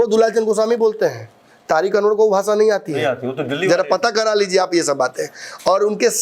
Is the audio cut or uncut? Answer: uncut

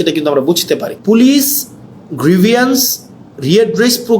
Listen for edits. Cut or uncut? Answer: cut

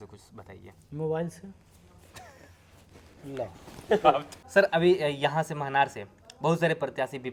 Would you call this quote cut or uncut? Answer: uncut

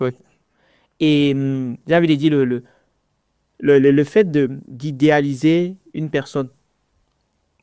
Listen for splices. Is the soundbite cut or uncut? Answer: uncut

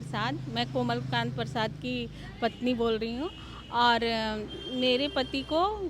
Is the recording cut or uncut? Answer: uncut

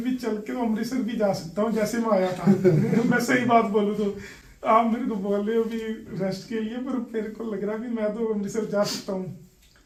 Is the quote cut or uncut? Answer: uncut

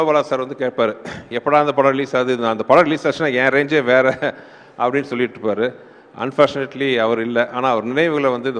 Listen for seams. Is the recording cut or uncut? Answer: uncut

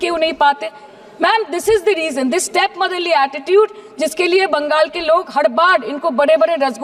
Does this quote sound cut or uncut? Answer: uncut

